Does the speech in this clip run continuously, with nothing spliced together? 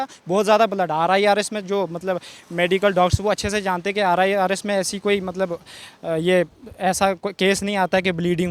yes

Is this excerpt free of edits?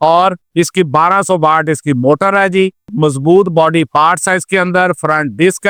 yes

